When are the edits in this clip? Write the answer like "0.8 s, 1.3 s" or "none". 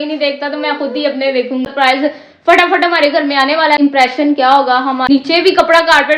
1.7 s, 3.8 s, 5.1 s